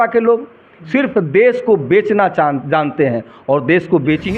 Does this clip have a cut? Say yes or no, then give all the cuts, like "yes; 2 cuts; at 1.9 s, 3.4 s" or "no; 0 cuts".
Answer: no; 0 cuts